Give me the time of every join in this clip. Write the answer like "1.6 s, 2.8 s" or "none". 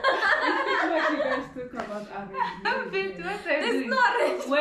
none